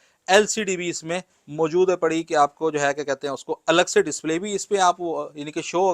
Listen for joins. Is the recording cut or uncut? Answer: uncut